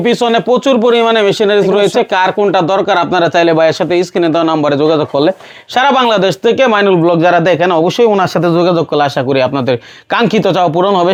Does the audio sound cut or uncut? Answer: uncut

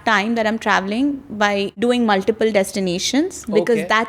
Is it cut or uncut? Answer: cut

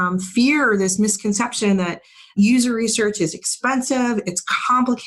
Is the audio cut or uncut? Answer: uncut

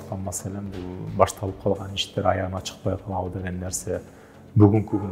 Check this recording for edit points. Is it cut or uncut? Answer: uncut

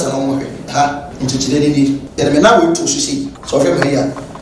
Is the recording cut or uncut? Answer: cut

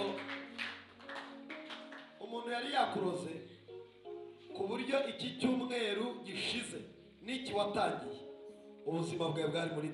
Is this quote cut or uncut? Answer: uncut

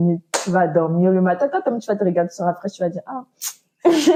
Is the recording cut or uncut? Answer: uncut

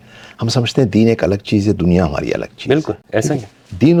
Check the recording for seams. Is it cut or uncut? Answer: uncut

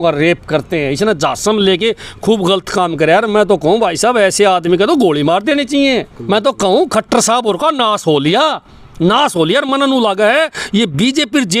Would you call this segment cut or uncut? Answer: cut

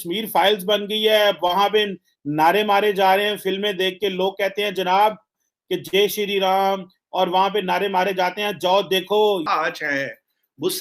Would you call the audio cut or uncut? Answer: cut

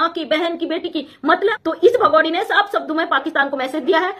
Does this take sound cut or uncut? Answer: cut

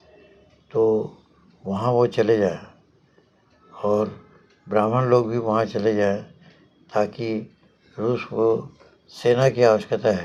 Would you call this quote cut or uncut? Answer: uncut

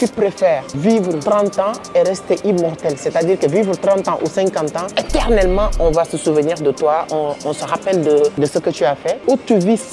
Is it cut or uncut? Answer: cut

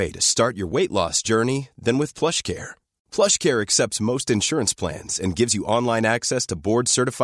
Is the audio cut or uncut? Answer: uncut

